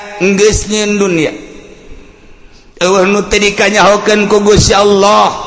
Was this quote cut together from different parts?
no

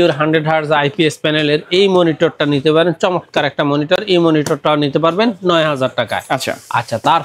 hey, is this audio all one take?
yes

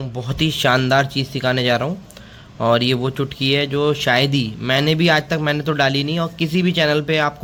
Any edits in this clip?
no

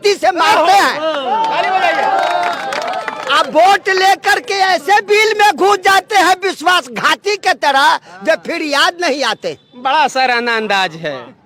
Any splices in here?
no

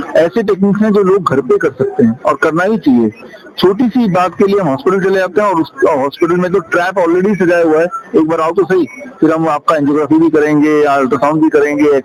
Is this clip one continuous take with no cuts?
yes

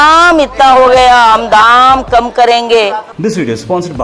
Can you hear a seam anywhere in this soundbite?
yes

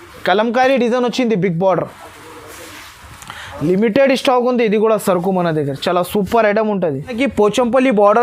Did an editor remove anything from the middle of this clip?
yes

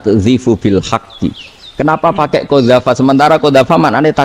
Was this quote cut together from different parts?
no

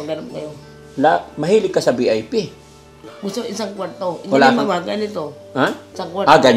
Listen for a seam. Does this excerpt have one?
no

